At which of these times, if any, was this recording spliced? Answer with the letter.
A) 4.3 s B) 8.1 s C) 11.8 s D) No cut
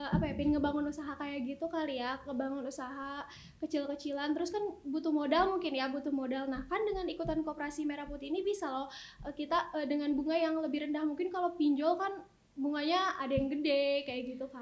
D